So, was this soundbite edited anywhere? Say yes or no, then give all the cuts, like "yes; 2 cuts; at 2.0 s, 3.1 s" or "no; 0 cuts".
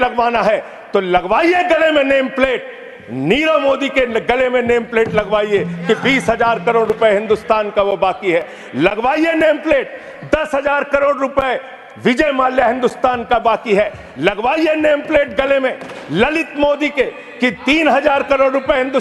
no; 0 cuts